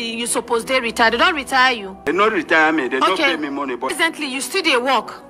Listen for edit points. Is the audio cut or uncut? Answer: cut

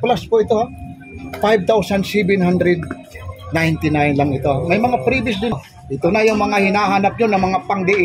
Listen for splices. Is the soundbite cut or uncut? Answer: cut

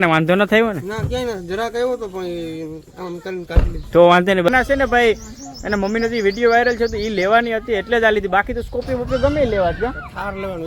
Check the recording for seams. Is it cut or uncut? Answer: cut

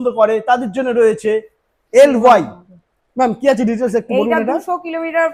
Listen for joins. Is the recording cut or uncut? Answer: uncut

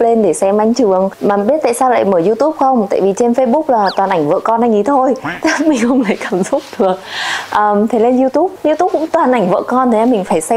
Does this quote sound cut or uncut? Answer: uncut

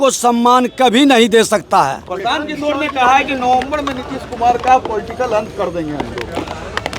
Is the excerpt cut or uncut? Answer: uncut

